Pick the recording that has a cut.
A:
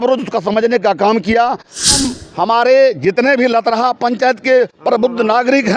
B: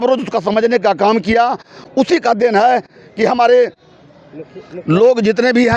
A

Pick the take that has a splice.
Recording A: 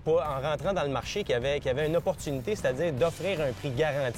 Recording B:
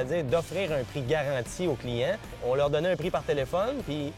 B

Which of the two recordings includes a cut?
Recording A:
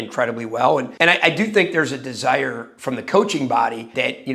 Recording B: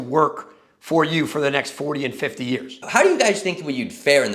B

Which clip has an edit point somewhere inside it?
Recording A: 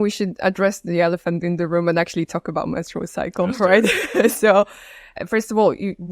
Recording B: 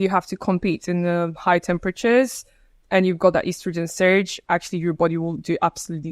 A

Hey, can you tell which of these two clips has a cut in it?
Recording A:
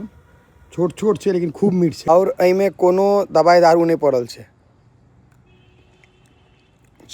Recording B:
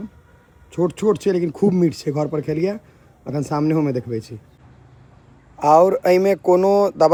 A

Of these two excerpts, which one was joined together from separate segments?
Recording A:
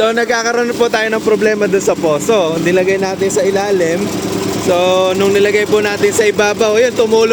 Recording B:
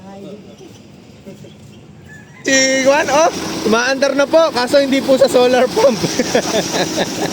B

